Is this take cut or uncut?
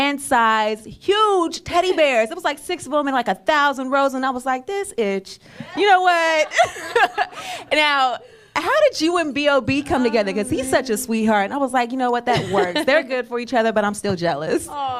cut